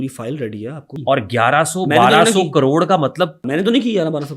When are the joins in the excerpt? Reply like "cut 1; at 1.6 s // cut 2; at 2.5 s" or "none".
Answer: cut 1; at 1.0 s // cut 2; at 3.4 s